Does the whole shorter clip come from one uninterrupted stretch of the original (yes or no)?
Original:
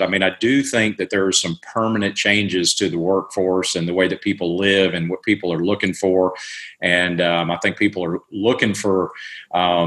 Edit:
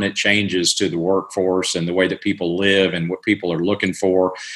yes